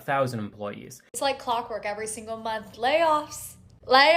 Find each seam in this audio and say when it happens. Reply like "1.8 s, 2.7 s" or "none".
1.0 s